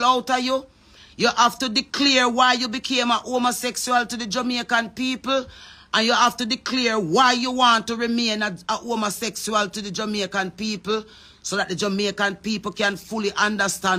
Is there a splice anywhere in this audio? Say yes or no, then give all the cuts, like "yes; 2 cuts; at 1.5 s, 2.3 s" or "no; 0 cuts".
no; 0 cuts